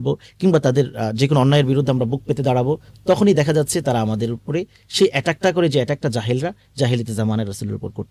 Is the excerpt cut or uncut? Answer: uncut